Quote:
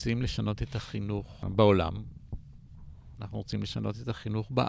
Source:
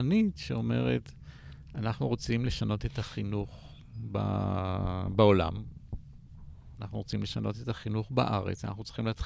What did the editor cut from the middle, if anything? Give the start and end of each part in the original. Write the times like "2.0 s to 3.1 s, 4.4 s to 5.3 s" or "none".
3.7 s to 5.0 s